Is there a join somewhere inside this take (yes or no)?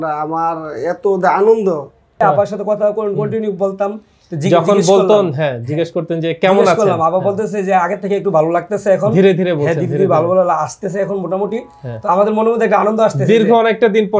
yes